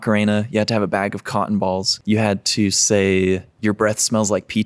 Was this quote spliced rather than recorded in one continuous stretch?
yes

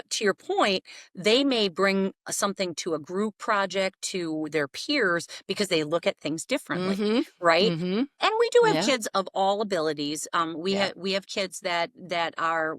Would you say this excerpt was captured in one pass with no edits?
yes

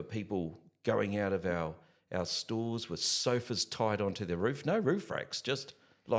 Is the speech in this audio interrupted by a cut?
no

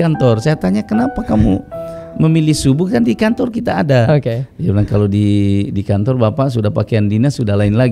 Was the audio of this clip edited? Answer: no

